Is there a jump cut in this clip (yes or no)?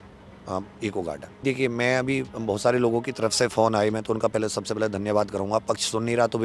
yes